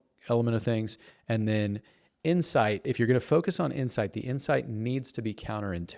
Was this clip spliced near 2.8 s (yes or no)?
yes